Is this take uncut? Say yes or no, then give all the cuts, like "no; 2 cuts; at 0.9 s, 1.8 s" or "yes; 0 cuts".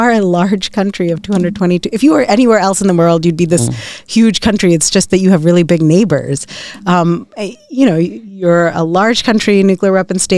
yes; 0 cuts